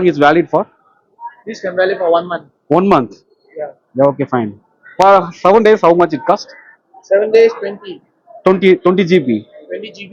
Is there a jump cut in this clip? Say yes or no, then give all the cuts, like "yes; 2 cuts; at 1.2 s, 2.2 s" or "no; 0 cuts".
no; 0 cuts